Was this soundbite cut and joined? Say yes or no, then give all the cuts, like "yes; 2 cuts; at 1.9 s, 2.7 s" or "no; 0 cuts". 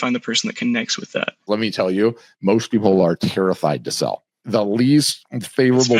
yes; 1 cut; at 1.4 s